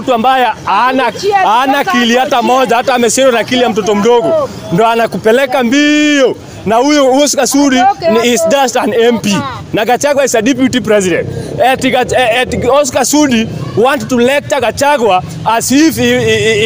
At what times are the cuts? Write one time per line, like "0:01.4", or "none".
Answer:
none